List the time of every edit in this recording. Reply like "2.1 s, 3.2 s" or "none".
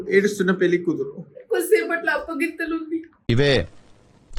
none

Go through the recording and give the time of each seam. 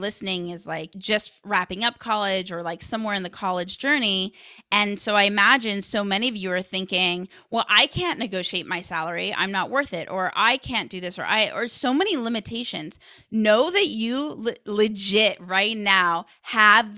0.9 s

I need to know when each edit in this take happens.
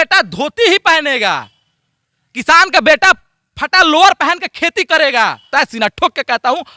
5.5 s

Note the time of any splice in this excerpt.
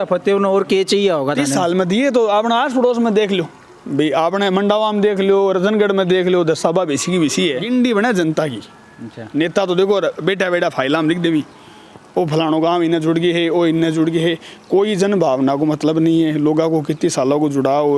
7.6 s

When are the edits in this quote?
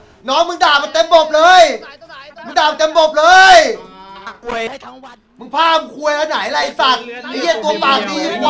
4.7 s

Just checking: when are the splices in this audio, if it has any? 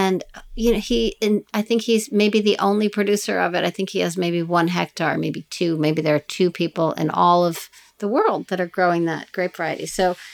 none

